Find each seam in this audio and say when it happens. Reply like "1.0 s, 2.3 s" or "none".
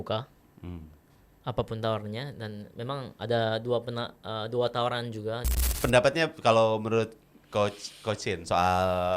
5.6 s